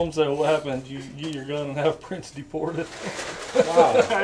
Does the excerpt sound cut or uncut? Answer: uncut